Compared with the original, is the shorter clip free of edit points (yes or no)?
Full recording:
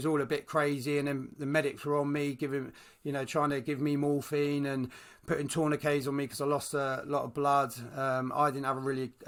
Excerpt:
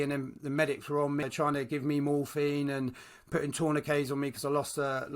no